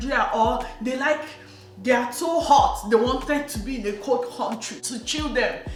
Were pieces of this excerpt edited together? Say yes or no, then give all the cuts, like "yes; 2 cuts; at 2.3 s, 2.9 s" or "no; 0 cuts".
no; 0 cuts